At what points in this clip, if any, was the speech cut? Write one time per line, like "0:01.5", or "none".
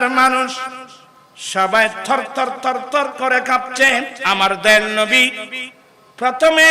0:04.1